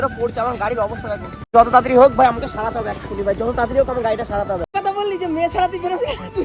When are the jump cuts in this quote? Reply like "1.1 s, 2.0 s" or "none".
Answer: 1.5 s, 4.7 s